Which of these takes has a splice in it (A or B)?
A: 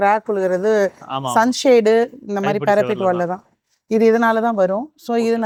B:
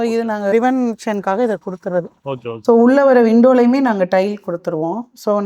B